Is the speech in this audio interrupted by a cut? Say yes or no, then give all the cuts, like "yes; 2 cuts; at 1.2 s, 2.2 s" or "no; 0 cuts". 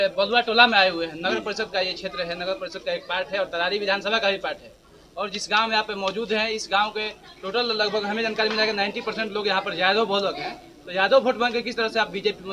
no; 0 cuts